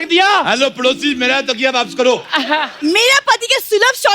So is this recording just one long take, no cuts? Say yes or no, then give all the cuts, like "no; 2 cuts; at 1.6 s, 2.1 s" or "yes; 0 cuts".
no; 1 cut; at 2.7 s